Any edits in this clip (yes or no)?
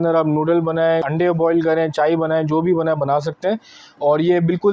no